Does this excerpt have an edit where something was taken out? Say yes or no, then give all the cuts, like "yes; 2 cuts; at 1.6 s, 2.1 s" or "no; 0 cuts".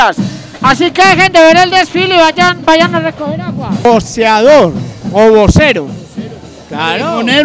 yes; 1 cut; at 3.8 s